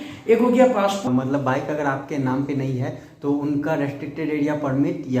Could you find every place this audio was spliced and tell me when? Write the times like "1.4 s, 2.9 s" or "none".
1.0 s